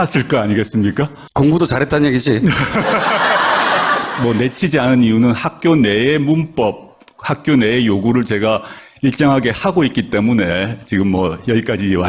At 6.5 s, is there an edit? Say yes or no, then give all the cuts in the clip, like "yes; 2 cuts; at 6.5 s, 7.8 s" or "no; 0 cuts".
yes; 1 cut; at 6.5 s